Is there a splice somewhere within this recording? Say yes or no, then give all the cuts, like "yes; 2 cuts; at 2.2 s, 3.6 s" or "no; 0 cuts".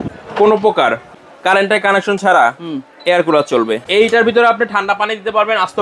yes; 1 cut; at 3.8 s